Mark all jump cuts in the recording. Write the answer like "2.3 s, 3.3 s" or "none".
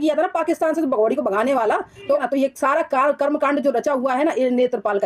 2.2 s